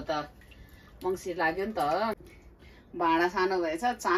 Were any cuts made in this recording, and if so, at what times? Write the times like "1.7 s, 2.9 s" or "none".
2.1 s

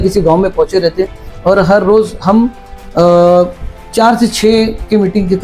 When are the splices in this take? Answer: none

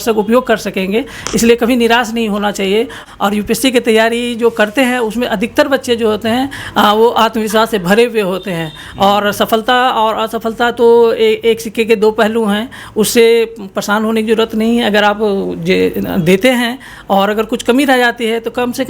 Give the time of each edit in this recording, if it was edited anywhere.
3.0 s

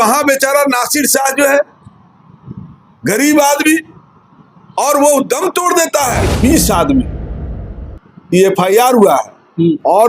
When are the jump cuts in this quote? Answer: 6.3 s

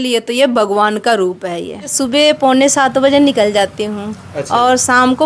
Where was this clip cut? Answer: 1.9 s

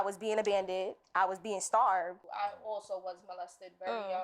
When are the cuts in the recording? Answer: 2.2 s

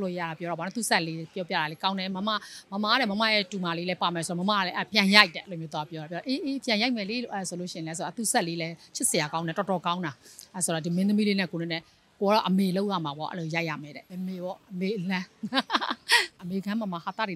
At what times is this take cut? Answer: 14.0 s, 16.4 s

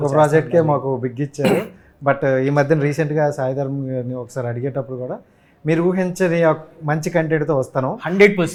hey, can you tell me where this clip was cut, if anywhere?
none

